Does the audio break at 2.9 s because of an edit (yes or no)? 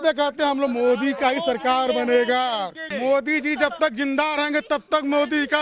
yes